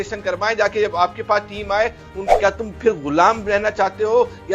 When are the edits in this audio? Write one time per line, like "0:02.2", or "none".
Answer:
0:02.2